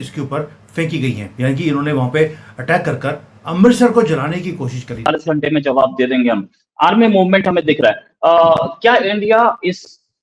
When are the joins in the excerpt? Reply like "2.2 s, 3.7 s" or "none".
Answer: 4.9 s